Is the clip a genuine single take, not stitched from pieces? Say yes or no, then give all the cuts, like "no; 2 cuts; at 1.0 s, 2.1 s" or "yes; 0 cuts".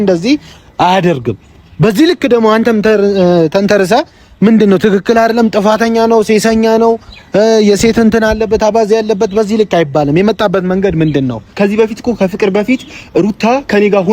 no; 1 cut; at 11.5 s